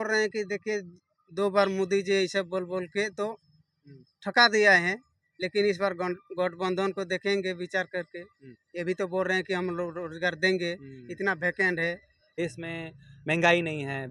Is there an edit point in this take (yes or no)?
yes